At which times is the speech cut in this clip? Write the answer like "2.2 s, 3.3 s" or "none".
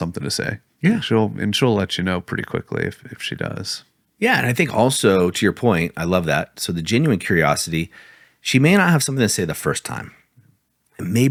none